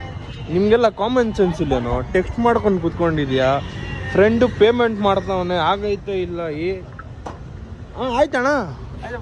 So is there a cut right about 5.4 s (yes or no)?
no